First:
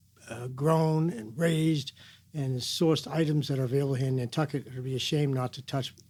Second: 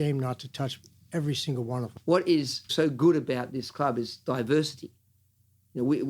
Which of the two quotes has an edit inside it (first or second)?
second